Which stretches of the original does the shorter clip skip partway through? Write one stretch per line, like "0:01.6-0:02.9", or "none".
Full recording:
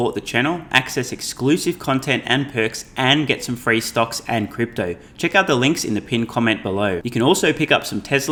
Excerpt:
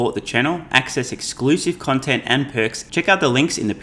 0:02.8-0:05.1

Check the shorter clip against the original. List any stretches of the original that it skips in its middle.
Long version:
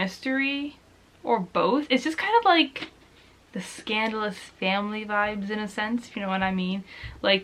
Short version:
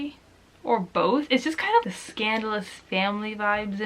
0:02.4-0:03.5

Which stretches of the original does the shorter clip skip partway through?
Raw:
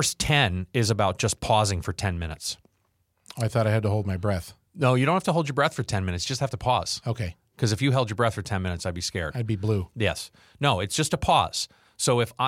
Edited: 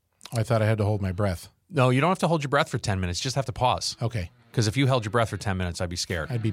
none

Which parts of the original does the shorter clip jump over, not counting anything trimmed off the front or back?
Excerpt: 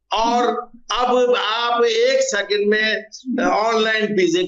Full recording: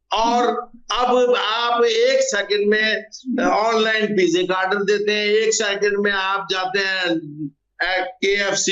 none

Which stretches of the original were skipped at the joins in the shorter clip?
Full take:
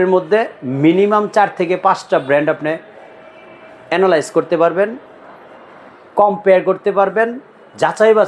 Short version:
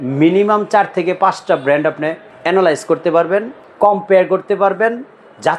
0:02.9-0:03.7
0:05.1-0:06.0

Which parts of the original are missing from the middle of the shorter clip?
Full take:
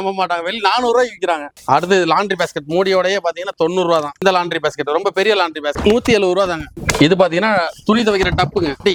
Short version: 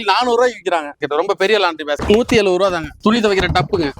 0:01.6-0:04.8
0:06.7-0:07.7

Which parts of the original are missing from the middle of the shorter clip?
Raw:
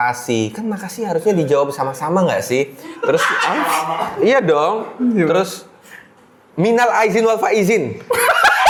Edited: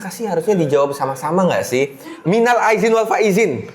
0:02.8-0:06.4

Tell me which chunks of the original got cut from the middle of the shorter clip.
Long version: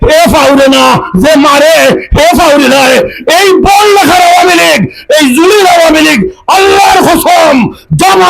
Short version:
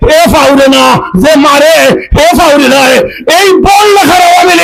none

